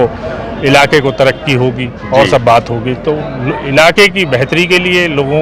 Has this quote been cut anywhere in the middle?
no; 0 cuts

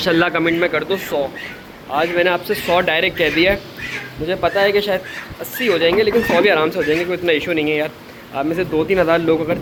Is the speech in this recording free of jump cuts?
yes; 0 cuts

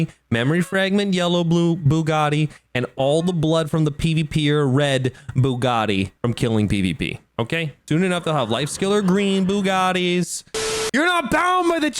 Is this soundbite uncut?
no; 1 cut; at 10.8 s

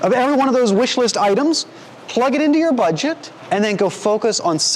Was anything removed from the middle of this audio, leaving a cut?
yes; 1 cut; at 3.3 s

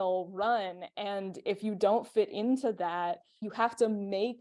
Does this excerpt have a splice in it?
no; 0 cuts

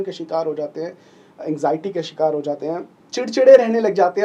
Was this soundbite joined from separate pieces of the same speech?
yes; 1 cut; at 3.0 s

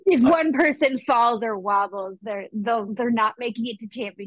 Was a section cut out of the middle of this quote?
no; 0 cuts

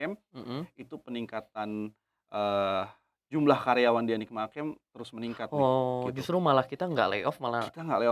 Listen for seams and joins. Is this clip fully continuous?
yes; 0 cuts

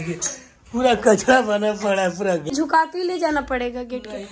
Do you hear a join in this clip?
yes; 1 cut; at 2.5 s

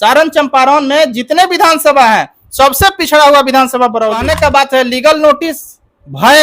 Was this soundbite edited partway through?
yes; 1 cut; at 4.2 s

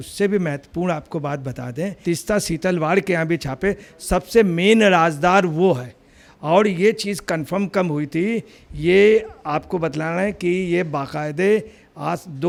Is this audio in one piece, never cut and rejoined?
yes; 0 cuts

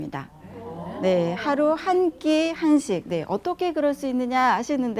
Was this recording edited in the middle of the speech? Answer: no; 0 cuts

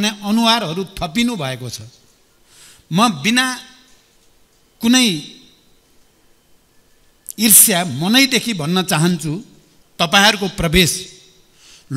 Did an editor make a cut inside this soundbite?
no; 0 cuts

